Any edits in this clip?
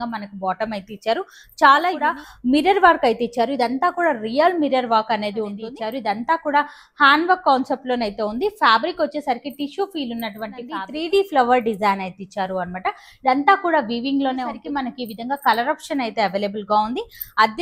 yes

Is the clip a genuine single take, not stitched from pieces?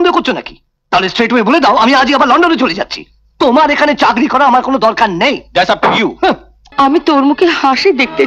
no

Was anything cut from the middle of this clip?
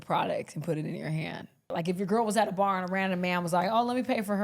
yes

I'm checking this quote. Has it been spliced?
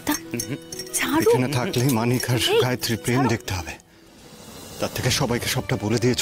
no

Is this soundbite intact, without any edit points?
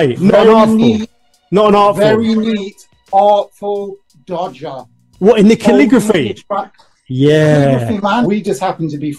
no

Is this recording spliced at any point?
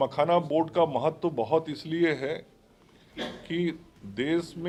no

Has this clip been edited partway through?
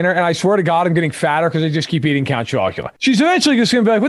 yes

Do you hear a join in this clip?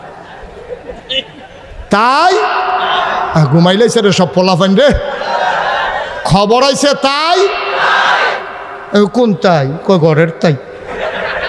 no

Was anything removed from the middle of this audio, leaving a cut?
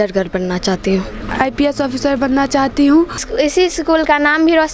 yes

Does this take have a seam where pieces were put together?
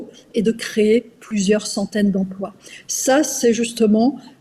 no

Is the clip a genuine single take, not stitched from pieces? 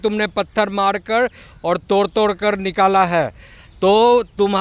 yes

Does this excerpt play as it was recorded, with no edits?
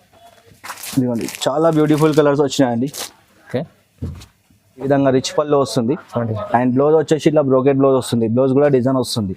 no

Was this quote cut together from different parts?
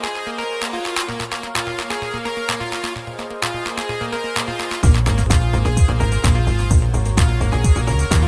no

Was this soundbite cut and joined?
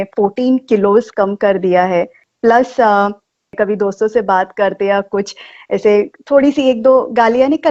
yes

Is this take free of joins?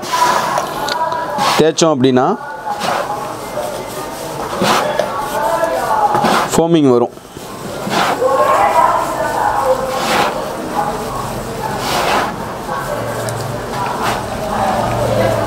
yes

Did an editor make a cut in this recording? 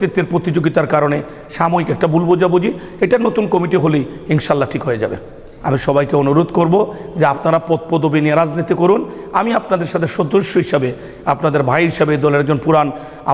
yes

